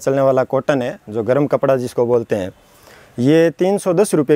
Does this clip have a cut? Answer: no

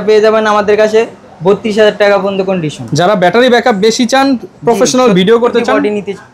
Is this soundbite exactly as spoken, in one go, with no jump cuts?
yes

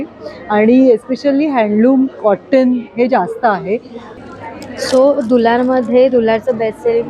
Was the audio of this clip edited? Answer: yes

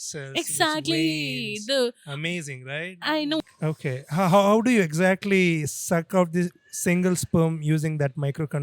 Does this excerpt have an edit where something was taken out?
yes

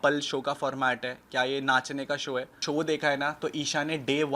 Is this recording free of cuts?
no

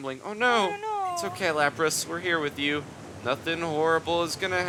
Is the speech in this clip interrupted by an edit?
no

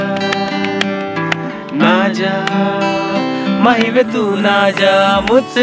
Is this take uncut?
yes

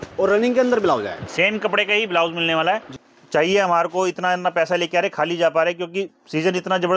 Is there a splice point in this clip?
no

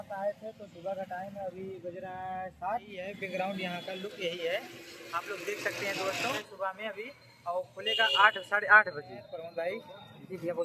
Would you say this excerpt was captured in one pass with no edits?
no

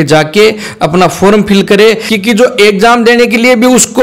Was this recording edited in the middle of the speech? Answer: yes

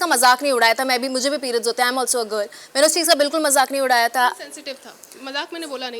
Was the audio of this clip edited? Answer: no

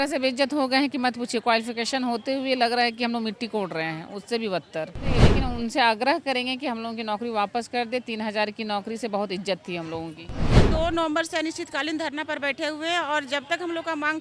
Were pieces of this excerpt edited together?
yes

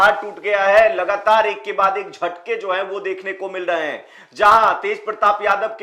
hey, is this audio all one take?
yes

